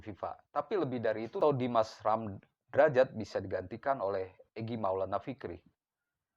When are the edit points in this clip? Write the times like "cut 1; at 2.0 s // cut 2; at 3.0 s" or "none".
cut 1; at 1.4 s